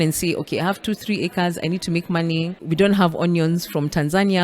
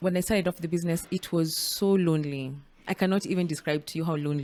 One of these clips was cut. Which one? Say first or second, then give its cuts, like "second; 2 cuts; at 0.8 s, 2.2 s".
first; 1 cut; at 2.6 s